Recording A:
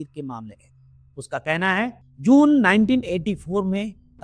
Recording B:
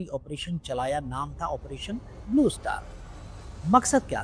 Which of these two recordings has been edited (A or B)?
A